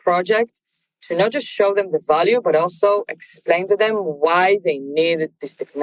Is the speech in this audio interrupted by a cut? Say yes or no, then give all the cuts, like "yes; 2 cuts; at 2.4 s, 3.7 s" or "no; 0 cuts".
yes; 1 cut; at 3.6 s